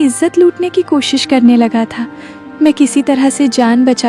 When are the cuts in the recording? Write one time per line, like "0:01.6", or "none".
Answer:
none